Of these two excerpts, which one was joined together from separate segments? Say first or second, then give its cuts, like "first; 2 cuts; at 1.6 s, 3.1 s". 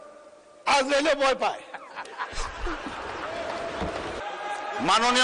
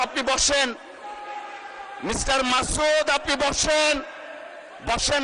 first; 1 cut; at 4.2 s